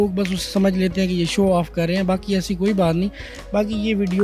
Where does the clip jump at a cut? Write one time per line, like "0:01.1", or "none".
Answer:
none